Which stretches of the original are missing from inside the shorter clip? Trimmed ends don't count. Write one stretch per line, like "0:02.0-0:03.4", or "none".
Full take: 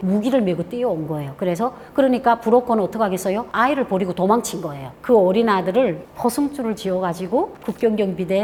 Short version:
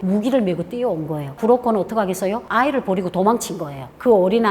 0:01.4-0:02.4